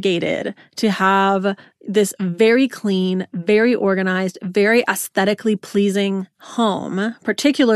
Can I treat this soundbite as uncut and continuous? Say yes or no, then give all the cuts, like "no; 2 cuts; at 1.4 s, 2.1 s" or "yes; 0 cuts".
yes; 0 cuts